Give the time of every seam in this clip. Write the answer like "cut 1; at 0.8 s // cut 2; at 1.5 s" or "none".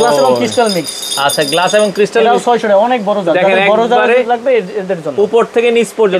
none